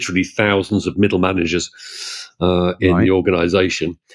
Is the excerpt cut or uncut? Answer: uncut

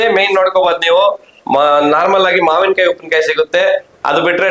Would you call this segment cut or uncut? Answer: uncut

